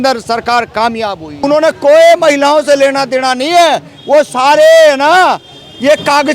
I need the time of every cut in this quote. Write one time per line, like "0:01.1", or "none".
0:01.3